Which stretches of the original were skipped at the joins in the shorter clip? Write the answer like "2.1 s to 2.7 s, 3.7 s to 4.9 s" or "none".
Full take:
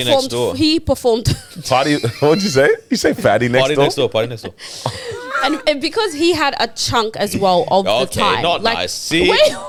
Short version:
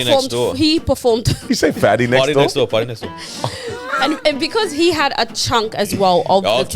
1.5 s to 2.9 s